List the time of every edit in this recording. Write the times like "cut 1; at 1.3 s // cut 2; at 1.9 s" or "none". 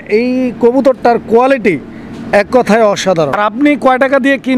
cut 1; at 3.4 s